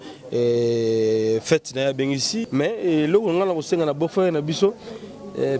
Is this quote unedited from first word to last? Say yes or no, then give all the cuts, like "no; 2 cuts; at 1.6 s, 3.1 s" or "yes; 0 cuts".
no; 1 cut; at 2.4 s